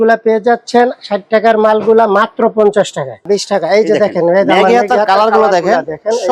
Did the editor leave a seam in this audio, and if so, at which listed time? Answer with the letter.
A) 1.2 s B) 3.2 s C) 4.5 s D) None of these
B